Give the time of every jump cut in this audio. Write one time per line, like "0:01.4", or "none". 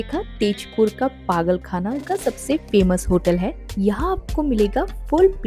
0:02.1